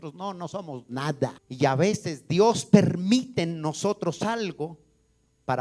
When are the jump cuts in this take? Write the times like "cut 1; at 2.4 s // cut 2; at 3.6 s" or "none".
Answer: cut 1; at 1.4 s